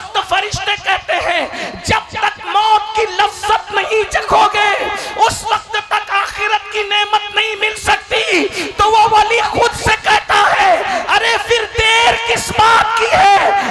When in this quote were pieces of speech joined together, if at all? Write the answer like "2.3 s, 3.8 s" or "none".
none